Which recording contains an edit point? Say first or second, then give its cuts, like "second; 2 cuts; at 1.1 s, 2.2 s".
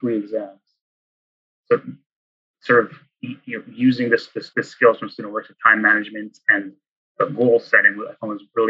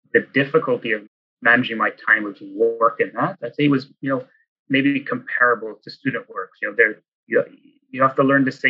second; 1 cut; at 1.0 s